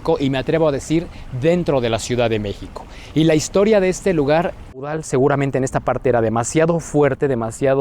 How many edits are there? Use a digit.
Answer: 1